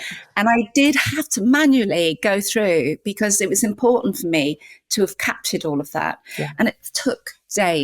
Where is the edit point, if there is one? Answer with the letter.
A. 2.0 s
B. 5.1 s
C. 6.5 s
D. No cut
C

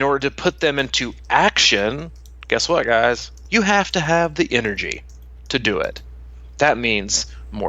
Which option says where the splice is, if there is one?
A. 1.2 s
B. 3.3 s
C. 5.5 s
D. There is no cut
B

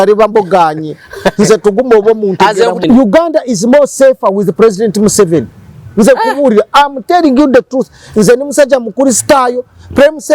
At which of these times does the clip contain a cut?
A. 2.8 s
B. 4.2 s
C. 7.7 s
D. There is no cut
A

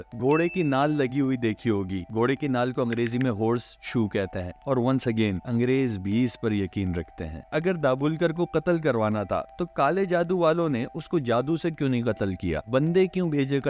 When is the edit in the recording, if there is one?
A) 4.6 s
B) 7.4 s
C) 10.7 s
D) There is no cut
B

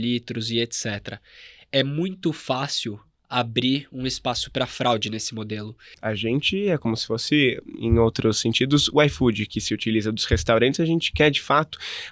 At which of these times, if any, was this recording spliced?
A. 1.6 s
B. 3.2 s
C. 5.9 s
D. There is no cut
C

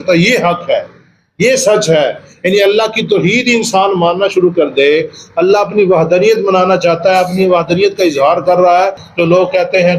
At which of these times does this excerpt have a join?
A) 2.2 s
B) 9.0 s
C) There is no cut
B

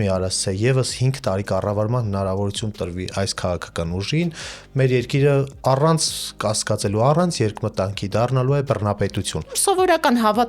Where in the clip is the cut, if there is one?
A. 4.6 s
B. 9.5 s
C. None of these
B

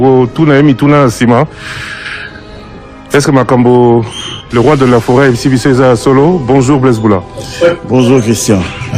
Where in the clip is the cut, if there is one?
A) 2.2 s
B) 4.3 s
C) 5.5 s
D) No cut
D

